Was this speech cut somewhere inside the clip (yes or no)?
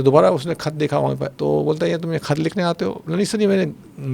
yes